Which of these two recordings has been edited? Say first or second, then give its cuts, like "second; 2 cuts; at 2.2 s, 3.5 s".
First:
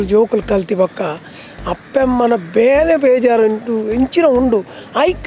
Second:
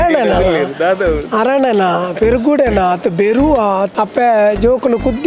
second; 1 cut; at 3.9 s